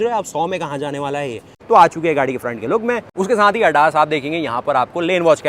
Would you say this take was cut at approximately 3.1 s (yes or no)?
yes